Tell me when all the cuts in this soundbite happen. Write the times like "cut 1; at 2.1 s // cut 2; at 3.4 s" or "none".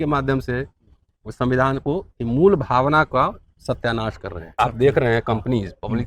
cut 1; at 4.4 s